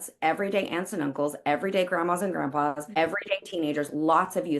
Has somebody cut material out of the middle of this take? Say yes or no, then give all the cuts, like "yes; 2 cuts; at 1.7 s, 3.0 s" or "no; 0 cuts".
yes; 1 cut; at 2.8 s